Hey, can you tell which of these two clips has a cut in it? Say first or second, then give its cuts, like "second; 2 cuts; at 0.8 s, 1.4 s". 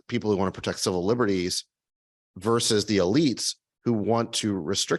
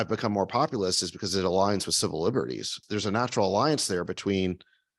second; 1 cut; at 2.8 s